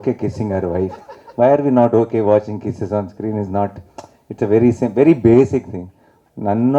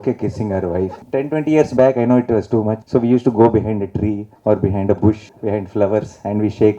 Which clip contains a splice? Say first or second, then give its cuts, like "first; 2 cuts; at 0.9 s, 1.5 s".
second; 4 cuts; at 1.0 s, 2.8 s, 4.3 s, 5.3 s